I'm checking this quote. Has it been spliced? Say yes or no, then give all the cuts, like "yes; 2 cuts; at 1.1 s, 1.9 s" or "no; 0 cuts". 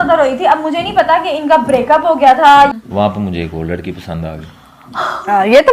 yes; 1 cut; at 2.7 s